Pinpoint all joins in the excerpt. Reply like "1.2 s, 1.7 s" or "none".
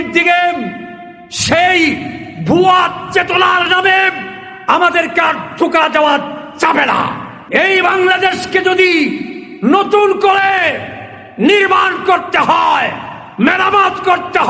7.3 s